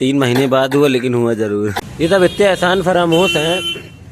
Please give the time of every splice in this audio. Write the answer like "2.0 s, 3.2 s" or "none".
1.7 s